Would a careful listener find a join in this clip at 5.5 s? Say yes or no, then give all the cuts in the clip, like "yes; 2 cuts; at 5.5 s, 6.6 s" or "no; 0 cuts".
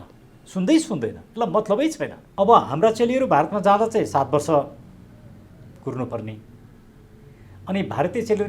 no; 1 cut; at 2.2 s